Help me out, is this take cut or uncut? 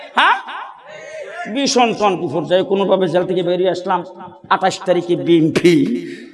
uncut